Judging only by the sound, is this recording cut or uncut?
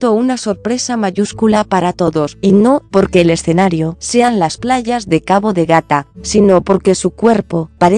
uncut